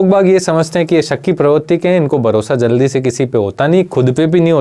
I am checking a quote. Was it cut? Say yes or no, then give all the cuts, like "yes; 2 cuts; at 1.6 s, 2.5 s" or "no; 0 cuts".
no; 0 cuts